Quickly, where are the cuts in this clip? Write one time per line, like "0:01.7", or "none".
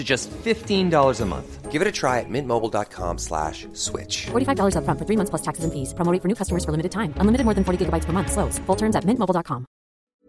none